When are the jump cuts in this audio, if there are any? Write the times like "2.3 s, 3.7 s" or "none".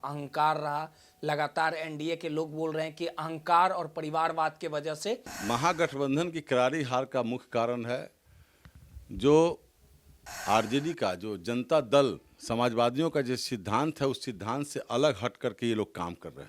5.4 s